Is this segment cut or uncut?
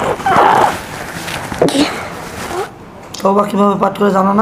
cut